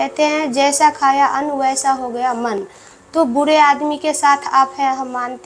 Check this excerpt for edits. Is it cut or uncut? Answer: uncut